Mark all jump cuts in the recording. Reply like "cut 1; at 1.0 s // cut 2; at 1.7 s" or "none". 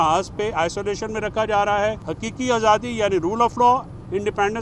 cut 1; at 2.0 s